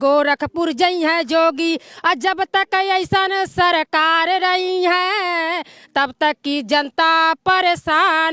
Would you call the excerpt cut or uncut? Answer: uncut